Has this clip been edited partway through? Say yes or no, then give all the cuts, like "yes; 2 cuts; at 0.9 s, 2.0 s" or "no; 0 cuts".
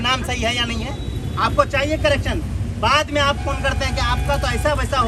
no; 0 cuts